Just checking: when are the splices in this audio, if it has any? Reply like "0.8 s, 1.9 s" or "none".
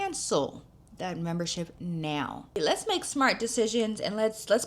2.6 s